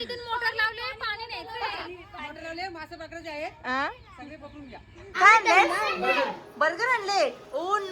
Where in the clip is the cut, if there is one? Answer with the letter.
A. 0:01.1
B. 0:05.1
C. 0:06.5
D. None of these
B